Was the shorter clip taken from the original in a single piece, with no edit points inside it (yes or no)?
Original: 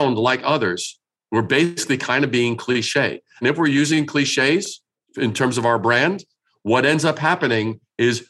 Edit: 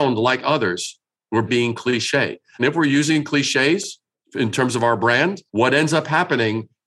no